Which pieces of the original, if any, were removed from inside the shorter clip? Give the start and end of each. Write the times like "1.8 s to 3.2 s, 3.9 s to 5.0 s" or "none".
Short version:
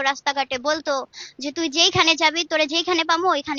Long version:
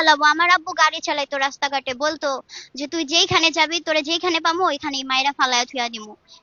none